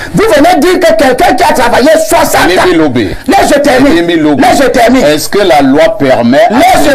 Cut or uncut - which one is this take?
uncut